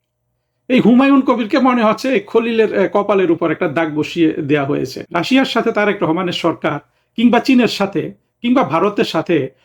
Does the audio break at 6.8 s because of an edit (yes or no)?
no